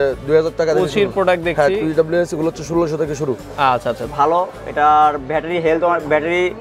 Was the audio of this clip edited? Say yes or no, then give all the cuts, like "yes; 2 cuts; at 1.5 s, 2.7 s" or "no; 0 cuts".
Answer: yes; 1 cut; at 4.1 s